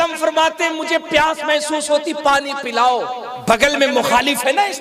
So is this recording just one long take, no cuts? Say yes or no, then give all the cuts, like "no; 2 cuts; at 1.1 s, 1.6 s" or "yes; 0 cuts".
no; 1 cut; at 3.3 s